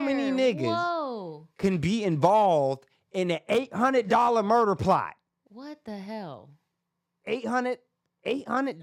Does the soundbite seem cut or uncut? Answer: uncut